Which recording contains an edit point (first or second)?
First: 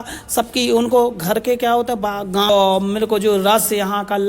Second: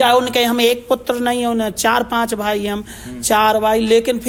first